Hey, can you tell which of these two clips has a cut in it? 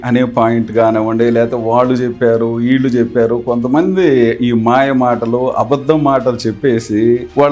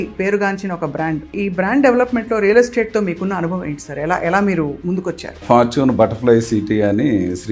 second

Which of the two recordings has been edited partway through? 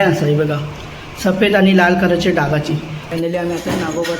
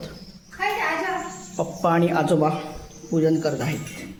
first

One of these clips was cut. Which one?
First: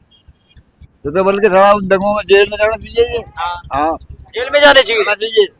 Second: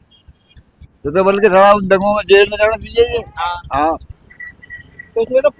second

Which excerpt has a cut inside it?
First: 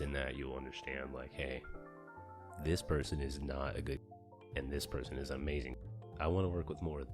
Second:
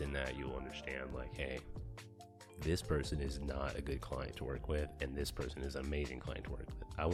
first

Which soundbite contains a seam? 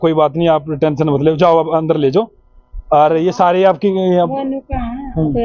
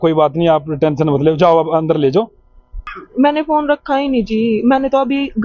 second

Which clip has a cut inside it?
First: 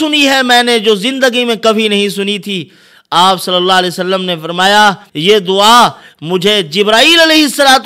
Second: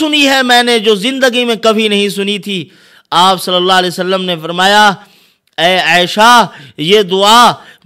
first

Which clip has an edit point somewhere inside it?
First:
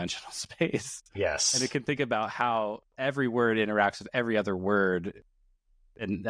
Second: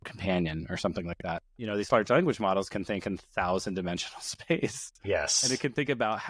second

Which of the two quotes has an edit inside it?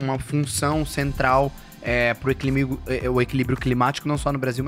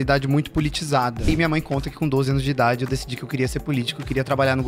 second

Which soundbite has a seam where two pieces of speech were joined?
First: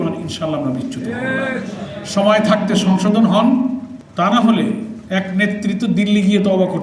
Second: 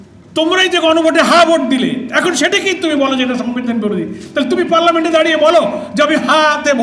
first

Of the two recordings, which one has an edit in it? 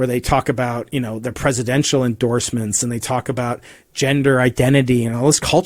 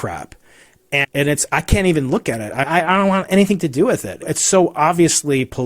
second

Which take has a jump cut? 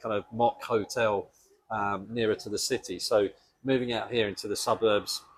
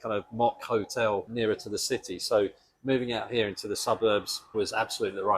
second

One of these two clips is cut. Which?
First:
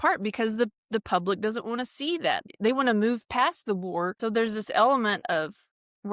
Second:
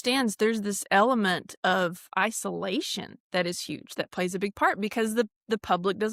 first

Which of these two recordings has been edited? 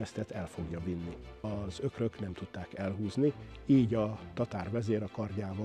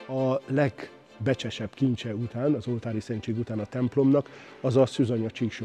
first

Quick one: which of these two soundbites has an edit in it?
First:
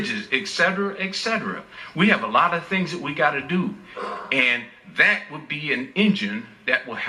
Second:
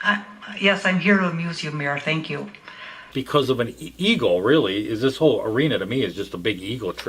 second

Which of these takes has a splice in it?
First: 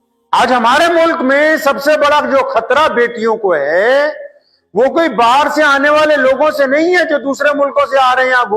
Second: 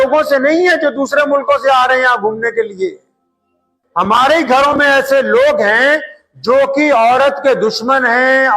second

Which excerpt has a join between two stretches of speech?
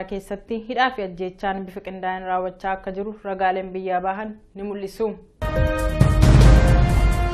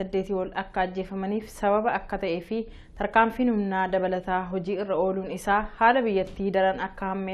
second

